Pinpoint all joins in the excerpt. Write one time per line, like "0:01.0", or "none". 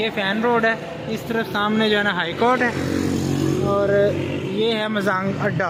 none